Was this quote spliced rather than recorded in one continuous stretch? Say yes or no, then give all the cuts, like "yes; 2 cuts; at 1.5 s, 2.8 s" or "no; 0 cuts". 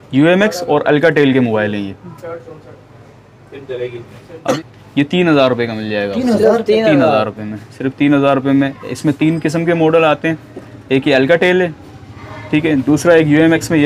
yes; 1 cut; at 4.6 s